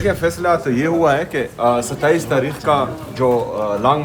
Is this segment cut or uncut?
uncut